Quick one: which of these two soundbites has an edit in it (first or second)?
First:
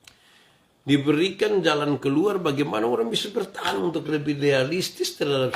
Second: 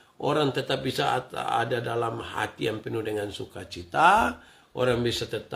first